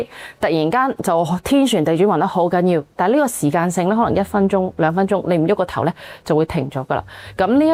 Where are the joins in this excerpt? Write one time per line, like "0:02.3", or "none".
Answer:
none